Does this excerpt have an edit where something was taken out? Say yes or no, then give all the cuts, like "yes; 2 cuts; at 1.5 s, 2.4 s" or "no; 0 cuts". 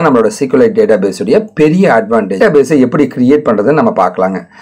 yes; 1 cut; at 2.4 s